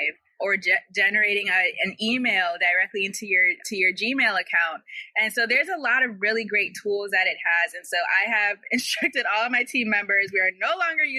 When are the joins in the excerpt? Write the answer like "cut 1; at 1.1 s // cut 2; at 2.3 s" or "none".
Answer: none